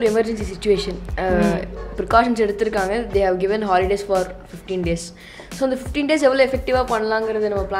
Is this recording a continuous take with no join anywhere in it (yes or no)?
yes